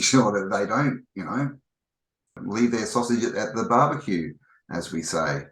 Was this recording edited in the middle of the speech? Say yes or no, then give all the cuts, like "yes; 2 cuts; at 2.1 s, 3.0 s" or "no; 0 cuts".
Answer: yes; 1 cut; at 2.4 s